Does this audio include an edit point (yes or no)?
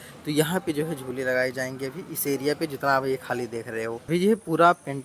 yes